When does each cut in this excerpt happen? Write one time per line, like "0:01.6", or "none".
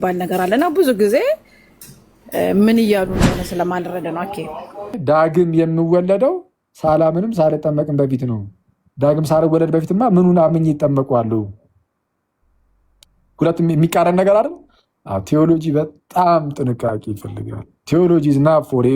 0:05.0